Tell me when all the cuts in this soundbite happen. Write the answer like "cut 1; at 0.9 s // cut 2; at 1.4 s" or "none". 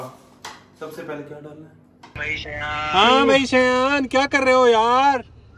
cut 1; at 2.1 s